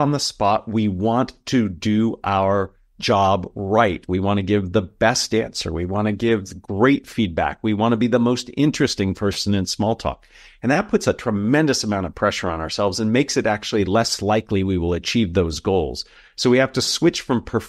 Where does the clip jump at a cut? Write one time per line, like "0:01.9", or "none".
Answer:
none